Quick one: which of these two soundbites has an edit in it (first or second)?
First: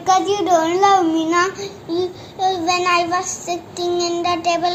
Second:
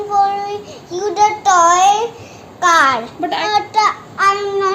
second